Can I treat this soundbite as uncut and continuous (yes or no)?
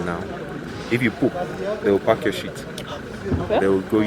yes